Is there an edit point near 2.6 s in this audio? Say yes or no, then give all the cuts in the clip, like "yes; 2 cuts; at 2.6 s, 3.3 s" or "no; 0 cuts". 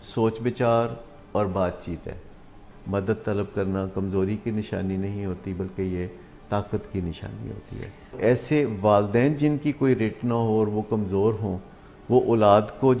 yes; 2 cuts; at 2.6 s, 8.2 s